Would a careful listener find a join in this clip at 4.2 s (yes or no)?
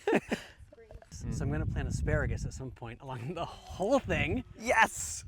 no